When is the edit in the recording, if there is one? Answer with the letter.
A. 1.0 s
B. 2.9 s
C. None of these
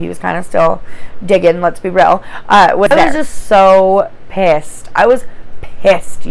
B